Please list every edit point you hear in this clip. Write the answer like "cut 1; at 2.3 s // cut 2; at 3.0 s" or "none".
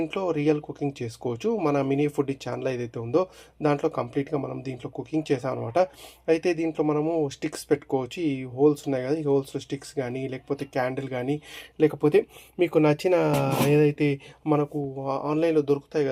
none